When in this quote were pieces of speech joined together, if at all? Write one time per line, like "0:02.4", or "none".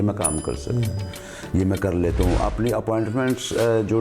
none